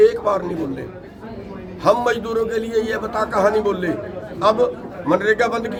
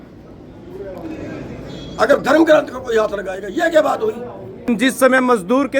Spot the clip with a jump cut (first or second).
second